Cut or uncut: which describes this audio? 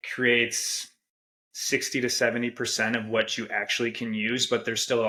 uncut